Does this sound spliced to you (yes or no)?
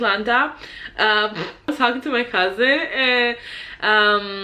yes